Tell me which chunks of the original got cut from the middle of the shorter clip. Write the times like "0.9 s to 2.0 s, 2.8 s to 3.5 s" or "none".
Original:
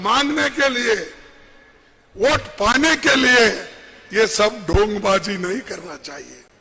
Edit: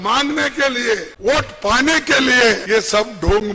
1.1 s to 2.1 s, 3.6 s to 4.1 s